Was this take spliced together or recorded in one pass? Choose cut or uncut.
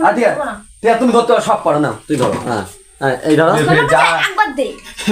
cut